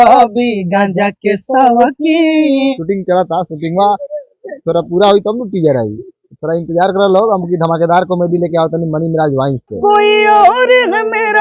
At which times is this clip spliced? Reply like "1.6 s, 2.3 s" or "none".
2.7 s, 9.8 s